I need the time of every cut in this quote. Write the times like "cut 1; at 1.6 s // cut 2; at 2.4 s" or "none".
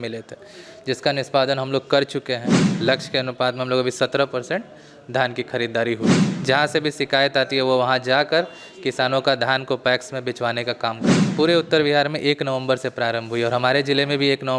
cut 1; at 2.7 s // cut 2; at 6.3 s // cut 3; at 11.2 s